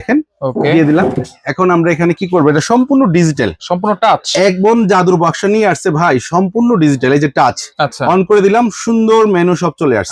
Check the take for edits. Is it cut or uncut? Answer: uncut